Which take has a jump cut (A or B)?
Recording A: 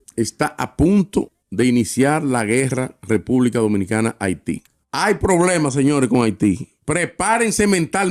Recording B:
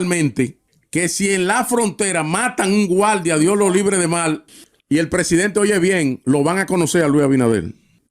B